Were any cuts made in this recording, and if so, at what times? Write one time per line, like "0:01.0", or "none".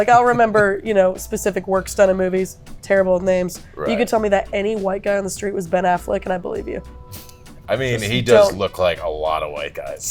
none